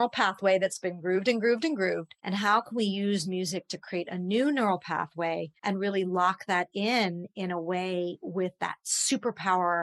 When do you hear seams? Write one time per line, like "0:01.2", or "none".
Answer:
0:02.1
0:05.5

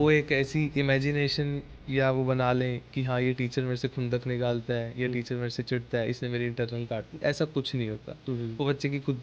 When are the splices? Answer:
none

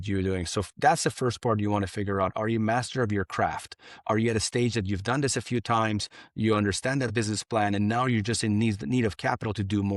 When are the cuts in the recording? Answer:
none

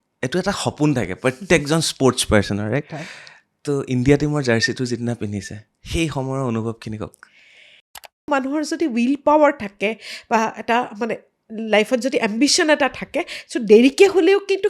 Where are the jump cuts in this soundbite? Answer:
0:08.3

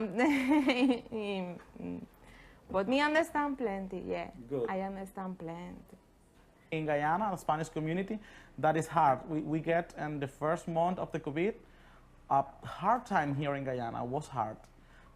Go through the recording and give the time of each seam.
0:06.7

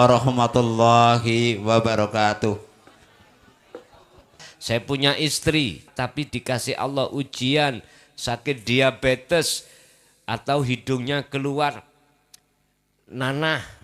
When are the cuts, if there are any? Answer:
0:04.5
0:05.9

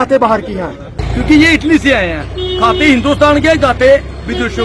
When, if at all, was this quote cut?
0:00.9

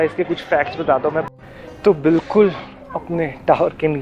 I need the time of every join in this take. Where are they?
0:01.2

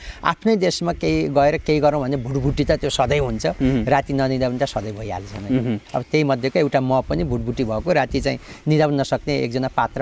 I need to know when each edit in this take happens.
none

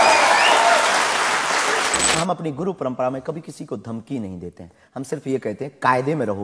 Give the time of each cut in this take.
0:02.2

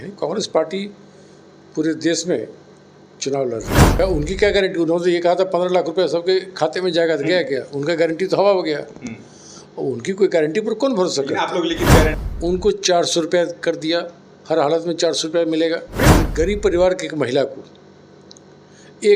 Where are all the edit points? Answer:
0:04.0
0:12.2
0:16.2

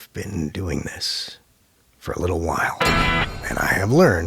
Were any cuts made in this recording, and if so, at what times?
none

